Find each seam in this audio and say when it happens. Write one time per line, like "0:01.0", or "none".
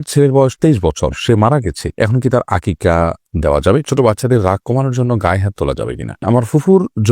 0:03.9
0:06.2